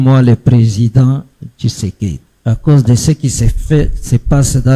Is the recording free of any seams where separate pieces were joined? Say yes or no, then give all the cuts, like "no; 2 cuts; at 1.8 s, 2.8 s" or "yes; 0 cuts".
no; 1 cut; at 2.3 s